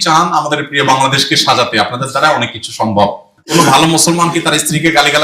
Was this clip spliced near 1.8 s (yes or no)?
no